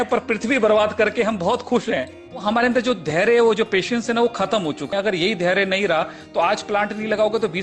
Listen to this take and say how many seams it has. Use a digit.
2